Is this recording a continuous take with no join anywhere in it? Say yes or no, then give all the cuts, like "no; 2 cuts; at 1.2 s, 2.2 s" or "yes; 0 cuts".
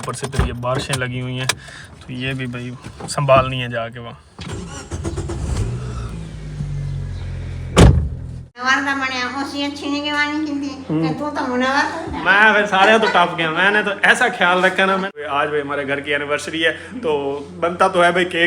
no; 2 cuts; at 8.6 s, 15.1 s